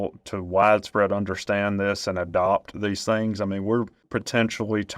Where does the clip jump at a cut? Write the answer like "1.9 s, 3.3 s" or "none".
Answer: 4.1 s